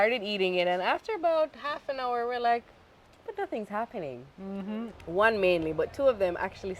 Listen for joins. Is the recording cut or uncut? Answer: cut